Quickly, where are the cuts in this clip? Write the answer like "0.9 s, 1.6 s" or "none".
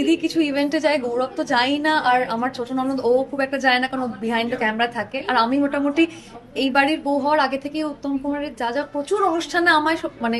none